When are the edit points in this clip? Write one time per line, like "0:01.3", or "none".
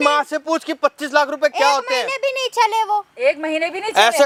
none